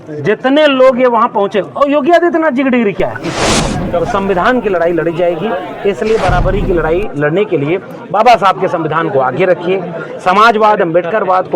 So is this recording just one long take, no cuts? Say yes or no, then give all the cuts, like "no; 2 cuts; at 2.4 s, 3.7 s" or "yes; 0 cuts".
no; 1 cut; at 3.4 s